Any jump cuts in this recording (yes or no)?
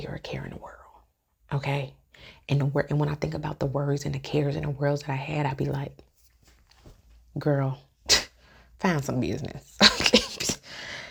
no